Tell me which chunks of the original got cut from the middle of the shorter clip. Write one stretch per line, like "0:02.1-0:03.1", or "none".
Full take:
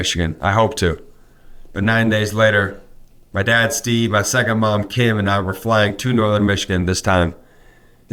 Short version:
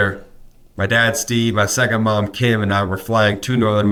none